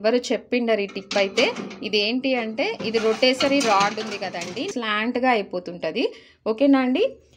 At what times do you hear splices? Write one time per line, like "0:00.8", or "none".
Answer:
0:04.7

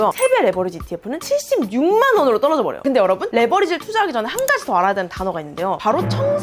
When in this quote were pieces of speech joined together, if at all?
0:02.7

